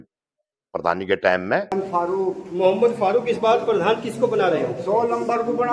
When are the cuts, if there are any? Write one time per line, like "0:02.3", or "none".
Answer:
0:01.7